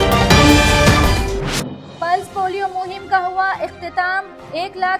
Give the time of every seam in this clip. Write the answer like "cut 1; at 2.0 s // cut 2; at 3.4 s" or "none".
cut 1; at 1.6 s